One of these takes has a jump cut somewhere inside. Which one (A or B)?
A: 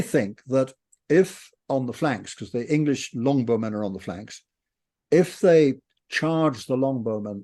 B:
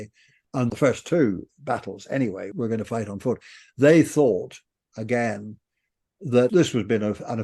B